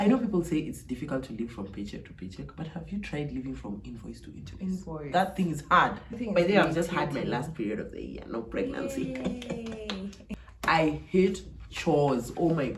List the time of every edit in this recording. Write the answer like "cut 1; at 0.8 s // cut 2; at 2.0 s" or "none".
cut 1; at 6.2 s // cut 2; at 10.2 s